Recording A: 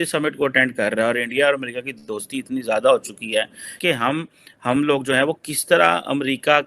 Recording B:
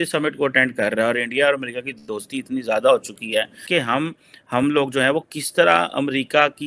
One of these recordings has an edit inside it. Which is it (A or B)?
B